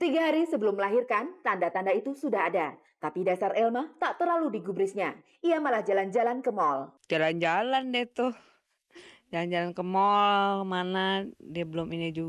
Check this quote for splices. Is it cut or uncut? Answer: cut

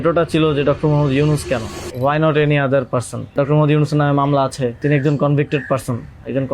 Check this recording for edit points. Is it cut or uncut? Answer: cut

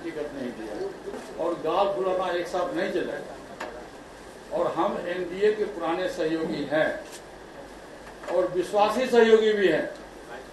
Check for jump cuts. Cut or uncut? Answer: cut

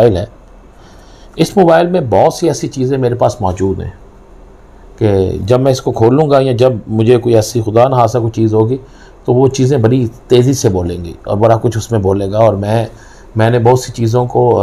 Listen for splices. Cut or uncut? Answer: uncut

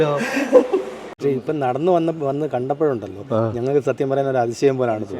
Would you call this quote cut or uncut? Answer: cut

